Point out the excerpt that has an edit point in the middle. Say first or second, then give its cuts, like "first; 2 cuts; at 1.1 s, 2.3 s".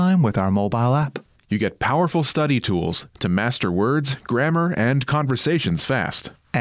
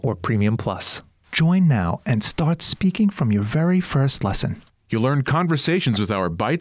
second; 1 cut; at 1.0 s